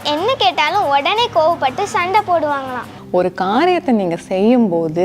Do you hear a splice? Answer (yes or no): yes